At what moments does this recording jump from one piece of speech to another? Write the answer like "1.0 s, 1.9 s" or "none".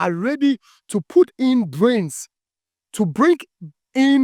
none